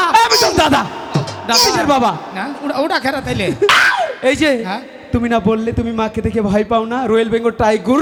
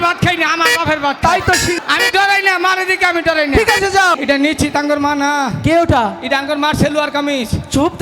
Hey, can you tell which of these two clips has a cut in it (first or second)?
second